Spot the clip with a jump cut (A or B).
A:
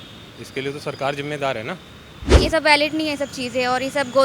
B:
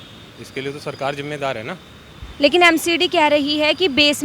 A